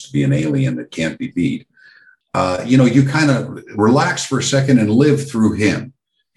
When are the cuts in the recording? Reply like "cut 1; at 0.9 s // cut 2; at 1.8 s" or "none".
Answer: none